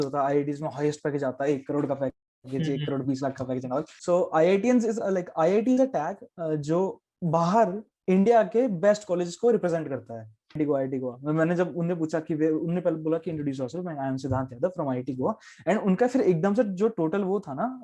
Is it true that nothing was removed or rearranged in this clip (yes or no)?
no